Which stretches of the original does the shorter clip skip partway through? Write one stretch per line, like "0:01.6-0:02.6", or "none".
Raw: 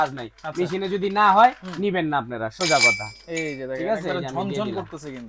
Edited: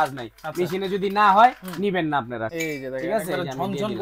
0:02.5-0:03.3

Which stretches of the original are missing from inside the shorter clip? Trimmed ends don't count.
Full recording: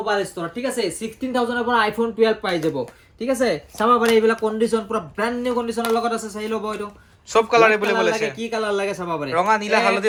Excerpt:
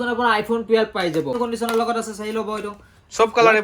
0:02.9-0:05.5

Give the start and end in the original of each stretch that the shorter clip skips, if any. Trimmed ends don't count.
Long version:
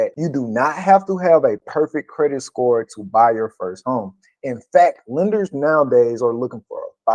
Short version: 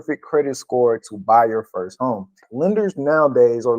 0:04.3-0:05.0

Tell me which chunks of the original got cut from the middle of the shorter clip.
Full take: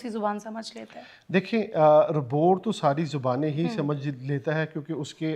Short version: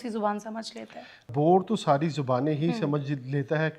0:01.2-0:02.2

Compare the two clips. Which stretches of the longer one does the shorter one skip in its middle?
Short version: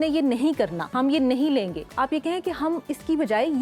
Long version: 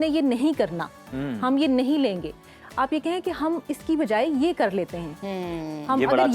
0:00.9-0:01.3
0:02.3-0:02.6

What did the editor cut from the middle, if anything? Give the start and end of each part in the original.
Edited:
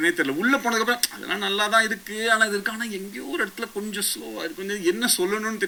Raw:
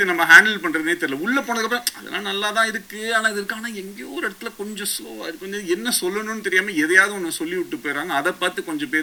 none

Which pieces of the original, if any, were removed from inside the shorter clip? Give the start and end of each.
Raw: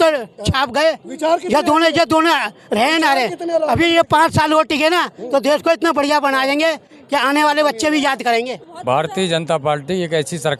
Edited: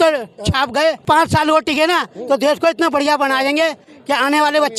0:01.0-0:04.1

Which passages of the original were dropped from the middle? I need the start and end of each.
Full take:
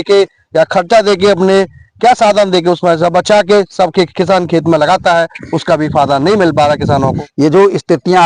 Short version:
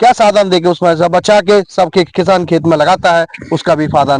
none

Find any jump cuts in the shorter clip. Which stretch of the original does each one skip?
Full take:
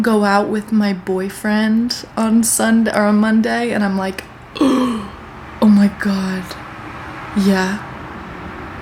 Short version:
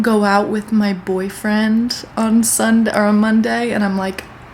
none

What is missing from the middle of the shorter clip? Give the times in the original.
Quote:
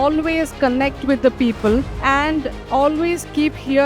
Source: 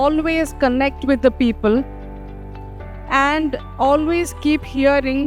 0:01.9-0:03.0

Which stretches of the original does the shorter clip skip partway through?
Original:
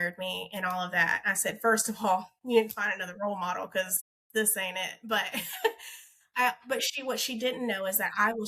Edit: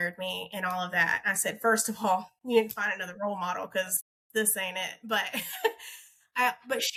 none

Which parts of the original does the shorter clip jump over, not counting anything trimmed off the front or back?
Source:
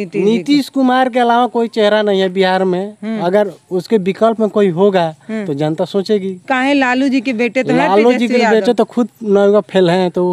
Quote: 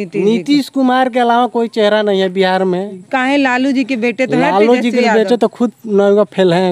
0:03.0-0:06.3

